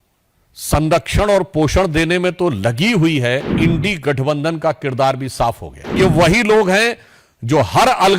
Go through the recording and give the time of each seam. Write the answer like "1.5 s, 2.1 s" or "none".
3.5 s, 5.9 s